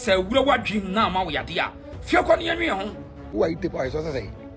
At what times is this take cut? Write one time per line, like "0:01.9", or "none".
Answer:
0:03.2